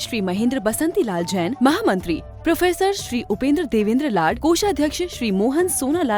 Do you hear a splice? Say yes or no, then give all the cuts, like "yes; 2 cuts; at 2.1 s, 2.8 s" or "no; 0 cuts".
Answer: no; 0 cuts